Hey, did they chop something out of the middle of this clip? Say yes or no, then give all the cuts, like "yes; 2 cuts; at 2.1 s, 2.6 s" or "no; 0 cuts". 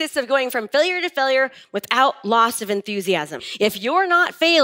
yes; 1 cut; at 3.5 s